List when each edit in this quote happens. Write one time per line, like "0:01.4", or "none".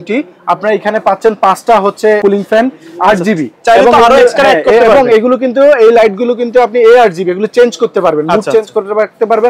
0:02.2